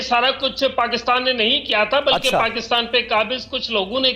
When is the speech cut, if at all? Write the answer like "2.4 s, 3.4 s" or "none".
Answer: none